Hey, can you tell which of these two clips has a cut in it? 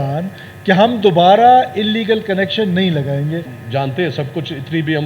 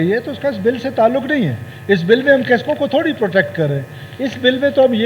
first; 1 cut; at 3.5 s

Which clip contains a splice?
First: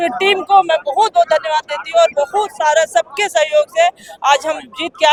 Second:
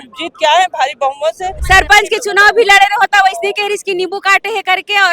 second; 1 cut; at 1.5 s

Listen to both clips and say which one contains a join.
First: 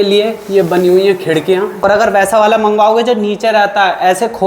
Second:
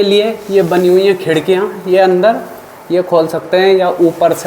first; 1 cut; at 1.8 s

